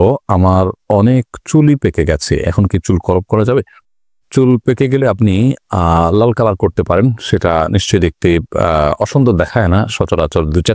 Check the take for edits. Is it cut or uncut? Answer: uncut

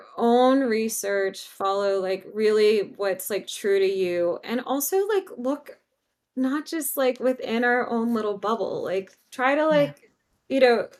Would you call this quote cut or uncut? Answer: uncut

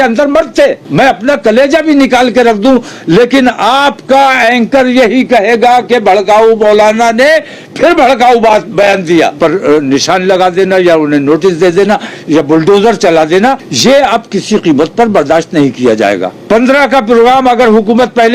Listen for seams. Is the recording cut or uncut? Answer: cut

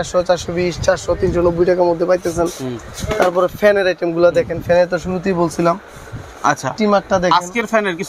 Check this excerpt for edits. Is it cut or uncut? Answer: uncut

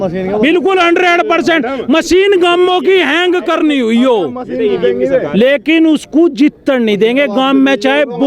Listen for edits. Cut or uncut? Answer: uncut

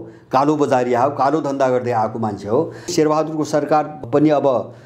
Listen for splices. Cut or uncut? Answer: cut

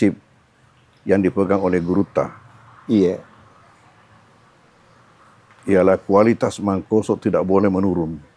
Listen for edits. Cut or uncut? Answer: uncut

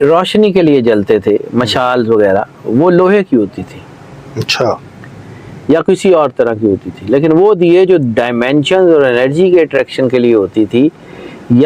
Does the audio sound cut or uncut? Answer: uncut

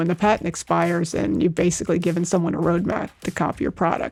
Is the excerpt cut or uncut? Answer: uncut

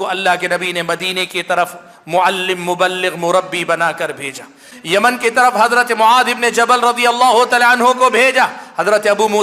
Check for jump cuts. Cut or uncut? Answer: cut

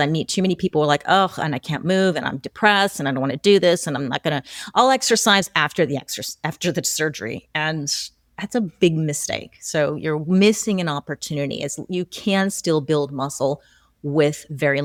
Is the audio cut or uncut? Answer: uncut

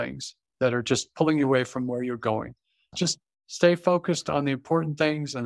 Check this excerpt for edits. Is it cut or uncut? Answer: cut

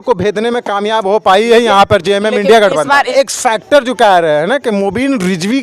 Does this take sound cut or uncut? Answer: cut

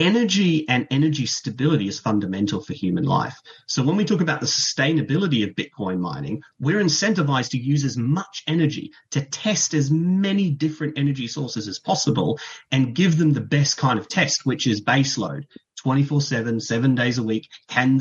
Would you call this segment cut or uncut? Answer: uncut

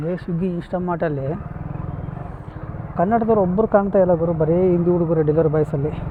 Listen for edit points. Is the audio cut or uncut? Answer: uncut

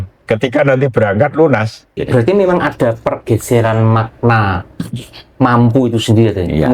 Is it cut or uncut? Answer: cut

